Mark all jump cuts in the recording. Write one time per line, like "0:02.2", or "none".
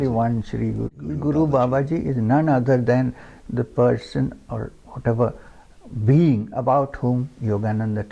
0:01.1